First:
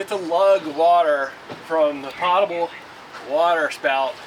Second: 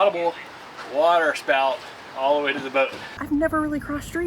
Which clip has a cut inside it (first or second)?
second